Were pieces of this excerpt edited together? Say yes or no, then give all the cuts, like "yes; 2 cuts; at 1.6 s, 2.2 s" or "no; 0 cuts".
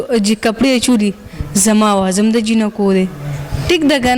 no; 0 cuts